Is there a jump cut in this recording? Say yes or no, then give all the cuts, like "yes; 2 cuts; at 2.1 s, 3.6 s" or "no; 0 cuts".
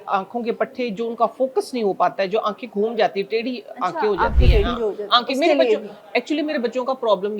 no; 0 cuts